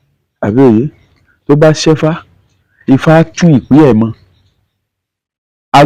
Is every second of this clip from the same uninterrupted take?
yes; 0 cuts

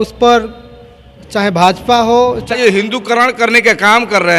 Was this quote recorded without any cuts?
no; 1 cut; at 2.6 s

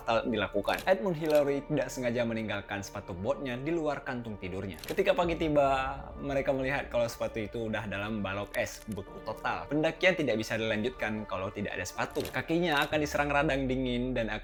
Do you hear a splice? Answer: no; 0 cuts

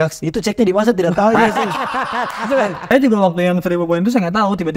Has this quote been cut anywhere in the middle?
yes; 1 cut; at 2.8 s

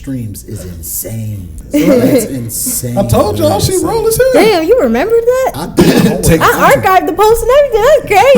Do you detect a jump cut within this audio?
yes; 2 cuts; at 1.6 s, 5.6 s

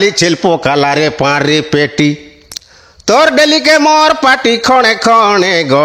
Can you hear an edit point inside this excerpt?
no; 0 cuts

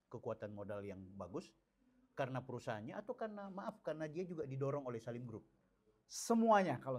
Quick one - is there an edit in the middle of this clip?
no; 0 cuts

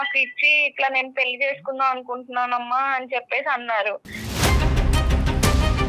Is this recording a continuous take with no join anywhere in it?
no; 1 cut; at 4.3 s

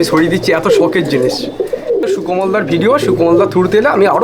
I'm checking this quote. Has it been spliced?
yes; 1 cut; at 2.0 s

